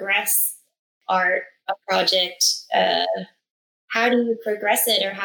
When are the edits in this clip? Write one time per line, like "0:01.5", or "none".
0:01.0